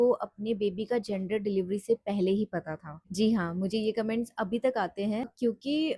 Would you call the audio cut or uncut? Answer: uncut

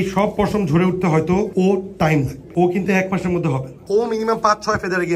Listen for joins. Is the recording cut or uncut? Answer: cut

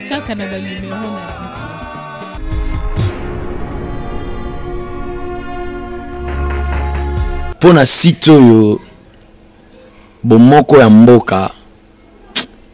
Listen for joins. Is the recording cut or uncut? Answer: cut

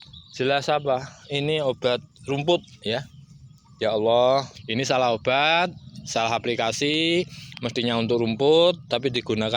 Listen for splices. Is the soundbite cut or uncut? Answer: cut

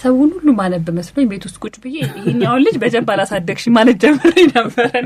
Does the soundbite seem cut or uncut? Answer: uncut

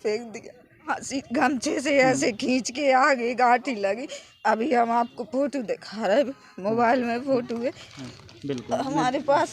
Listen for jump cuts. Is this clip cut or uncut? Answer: cut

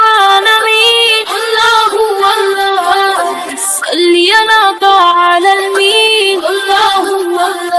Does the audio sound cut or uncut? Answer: uncut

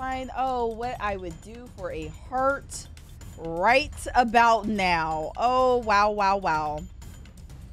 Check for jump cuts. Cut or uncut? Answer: uncut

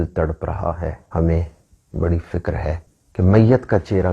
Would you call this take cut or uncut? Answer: cut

